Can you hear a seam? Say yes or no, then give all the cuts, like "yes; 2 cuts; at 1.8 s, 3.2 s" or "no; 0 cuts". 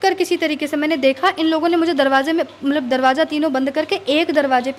no; 0 cuts